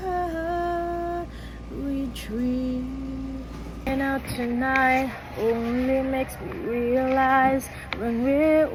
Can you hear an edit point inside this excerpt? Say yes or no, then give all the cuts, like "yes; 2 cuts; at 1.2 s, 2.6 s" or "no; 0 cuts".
no; 0 cuts